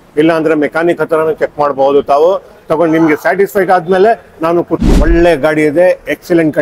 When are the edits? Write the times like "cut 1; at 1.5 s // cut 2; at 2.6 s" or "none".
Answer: cut 1; at 4.8 s